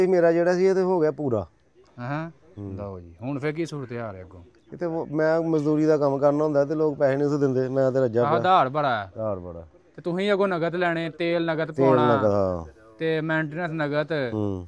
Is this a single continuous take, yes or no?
yes